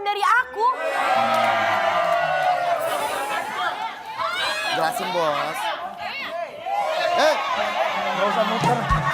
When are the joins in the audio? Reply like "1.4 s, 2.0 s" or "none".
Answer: none